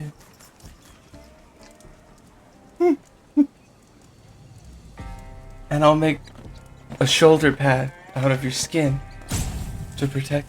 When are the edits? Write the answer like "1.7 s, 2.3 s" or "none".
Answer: none